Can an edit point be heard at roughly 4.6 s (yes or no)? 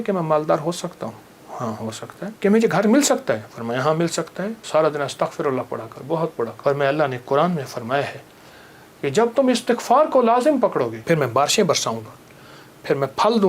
yes